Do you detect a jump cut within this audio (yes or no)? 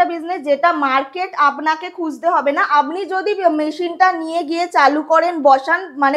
no